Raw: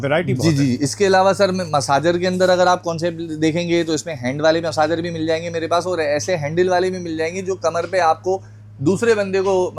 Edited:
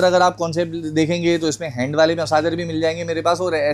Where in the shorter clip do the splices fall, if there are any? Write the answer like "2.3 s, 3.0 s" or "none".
none